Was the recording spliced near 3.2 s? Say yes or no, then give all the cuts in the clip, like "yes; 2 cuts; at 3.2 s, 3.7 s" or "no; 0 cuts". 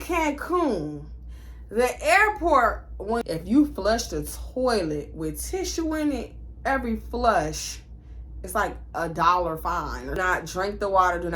yes; 2 cuts; at 3.2 s, 10.2 s